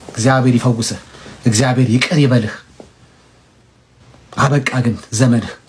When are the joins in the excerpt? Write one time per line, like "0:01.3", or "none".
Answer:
none